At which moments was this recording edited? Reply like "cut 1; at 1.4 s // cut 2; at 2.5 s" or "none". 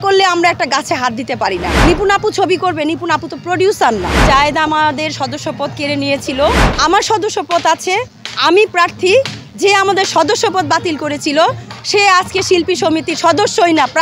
cut 1; at 1.8 s // cut 2; at 4.2 s // cut 3; at 6.7 s